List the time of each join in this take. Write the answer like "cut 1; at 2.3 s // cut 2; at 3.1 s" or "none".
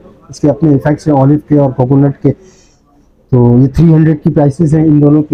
none

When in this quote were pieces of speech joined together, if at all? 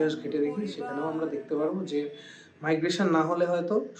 none

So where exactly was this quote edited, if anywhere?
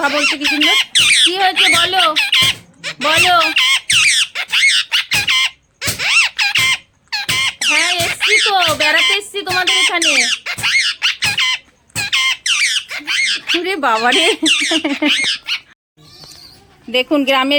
none

